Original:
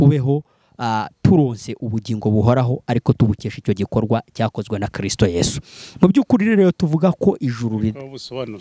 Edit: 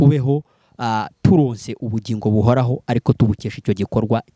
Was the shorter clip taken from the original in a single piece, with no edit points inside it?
yes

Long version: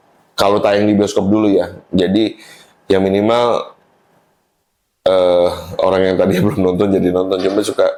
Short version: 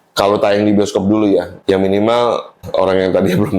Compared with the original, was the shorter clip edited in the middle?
yes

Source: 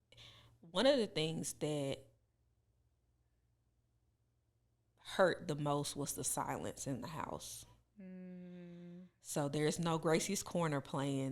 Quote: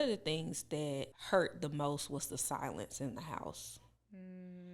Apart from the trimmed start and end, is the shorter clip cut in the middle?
yes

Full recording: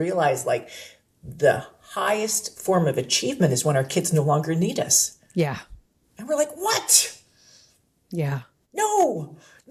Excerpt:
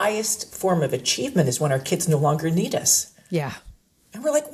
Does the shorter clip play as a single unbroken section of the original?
yes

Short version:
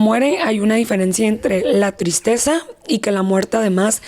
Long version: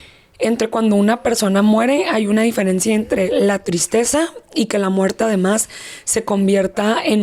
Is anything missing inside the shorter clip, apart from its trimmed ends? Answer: no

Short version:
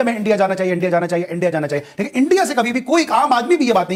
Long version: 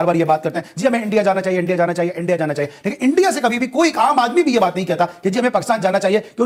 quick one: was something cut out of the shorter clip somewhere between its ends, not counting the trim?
no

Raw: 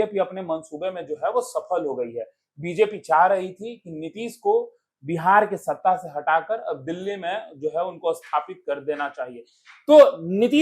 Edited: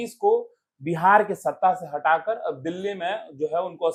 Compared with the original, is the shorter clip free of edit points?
yes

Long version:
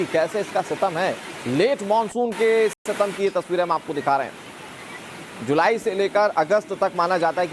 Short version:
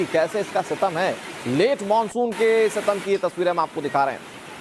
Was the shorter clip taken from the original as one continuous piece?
no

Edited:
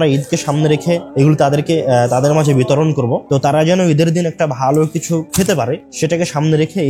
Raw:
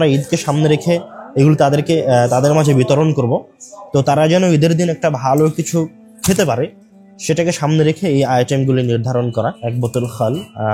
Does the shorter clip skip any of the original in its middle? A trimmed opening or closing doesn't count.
yes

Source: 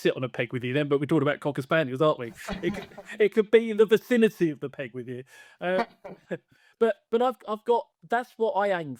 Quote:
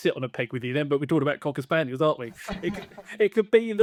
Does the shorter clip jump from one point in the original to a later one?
no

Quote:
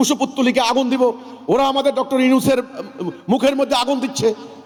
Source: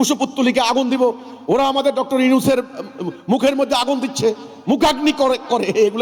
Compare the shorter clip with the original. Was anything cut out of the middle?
no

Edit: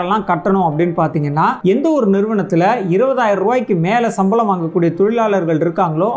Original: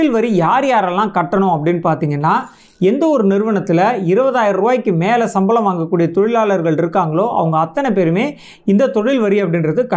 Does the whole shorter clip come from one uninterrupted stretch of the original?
no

